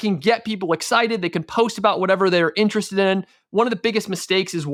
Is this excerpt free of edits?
yes; 0 cuts

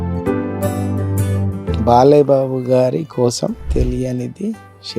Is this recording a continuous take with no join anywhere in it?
no; 1 cut; at 1.8 s

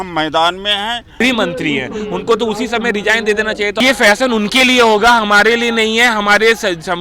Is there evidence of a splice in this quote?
yes; 2 cuts; at 1.2 s, 3.8 s

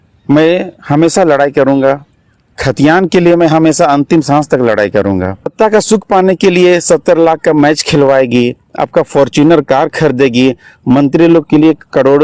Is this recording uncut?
no; 1 cut; at 5.5 s

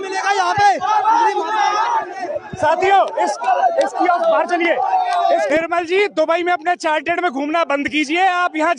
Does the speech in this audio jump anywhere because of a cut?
yes; 1 cut; at 5.5 s

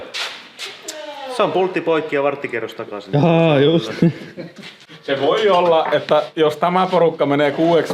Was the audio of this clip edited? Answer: yes; 1 cut; at 4.7 s

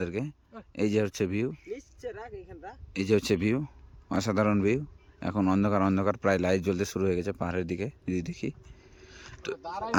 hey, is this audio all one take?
yes; 0 cuts

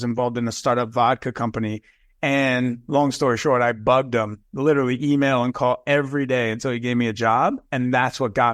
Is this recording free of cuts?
yes; 0 cuts

